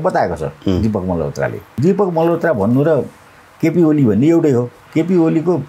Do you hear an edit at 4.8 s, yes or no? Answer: yes